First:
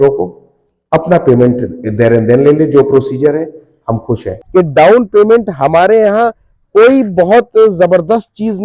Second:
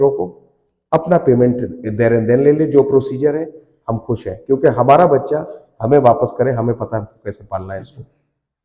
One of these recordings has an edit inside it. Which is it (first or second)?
first